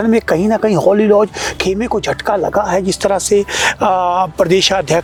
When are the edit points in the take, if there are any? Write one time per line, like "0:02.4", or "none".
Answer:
none